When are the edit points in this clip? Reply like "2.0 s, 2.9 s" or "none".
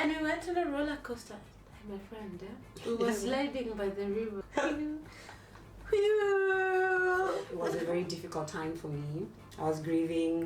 4.4 s, 7.5 s